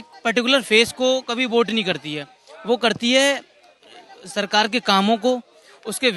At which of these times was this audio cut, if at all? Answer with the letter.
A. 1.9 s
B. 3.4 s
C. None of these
C